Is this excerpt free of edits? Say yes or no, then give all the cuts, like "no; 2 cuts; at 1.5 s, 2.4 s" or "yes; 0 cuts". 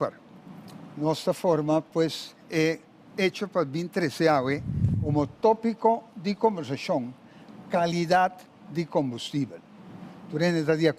yes; 0 cuts